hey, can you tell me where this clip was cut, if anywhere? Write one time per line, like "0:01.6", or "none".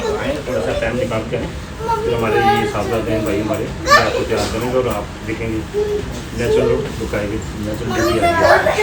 none